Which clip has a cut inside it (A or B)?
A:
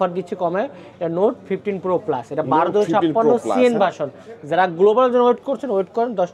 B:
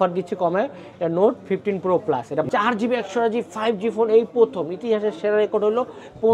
B